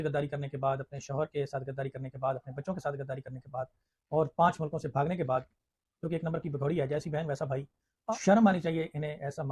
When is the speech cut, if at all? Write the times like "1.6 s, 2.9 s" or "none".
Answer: 7.9 s

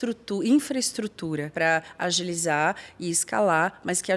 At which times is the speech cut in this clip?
1.5 s

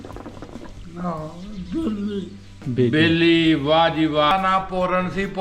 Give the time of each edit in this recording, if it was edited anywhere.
4.3 s

